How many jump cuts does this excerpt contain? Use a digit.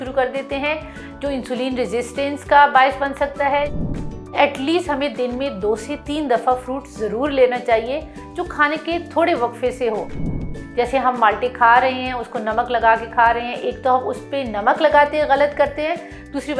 2